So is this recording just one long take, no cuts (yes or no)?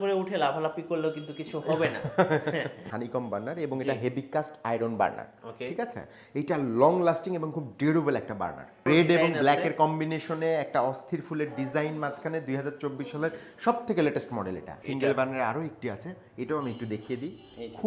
no